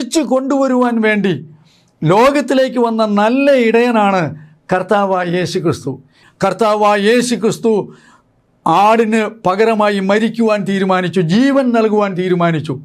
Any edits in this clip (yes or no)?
yes